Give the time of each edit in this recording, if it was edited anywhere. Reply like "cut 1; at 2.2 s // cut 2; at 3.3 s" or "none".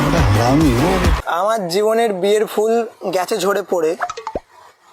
cut 1; at 1.2 s

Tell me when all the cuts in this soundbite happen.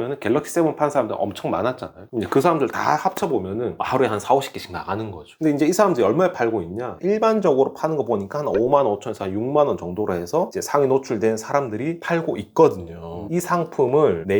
cut 1; at 13.2 s

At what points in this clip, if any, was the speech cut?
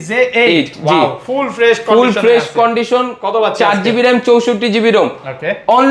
none

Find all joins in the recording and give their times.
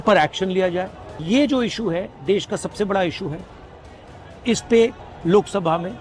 cut 1; at 1.2 s // cut 2; at 5.1 s

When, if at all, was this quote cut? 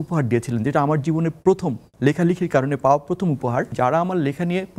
cut 1; at 3.7 s

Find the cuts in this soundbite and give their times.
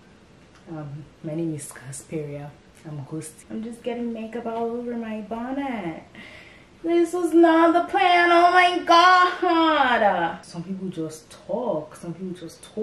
cut 1; at 3.4 s // cut 2; at 10.3 s

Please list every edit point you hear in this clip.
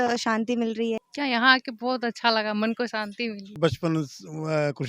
cut 1; at 1.0 s // cut 2; at 3.6 s

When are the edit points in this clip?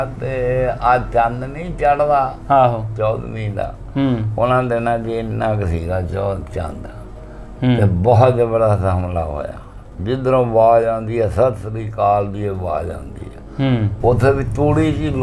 cut 1; at 13.9 s

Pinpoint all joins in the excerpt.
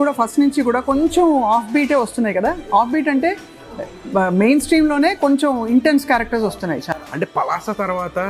none

